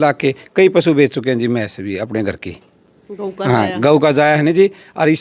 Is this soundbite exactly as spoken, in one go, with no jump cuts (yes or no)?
yes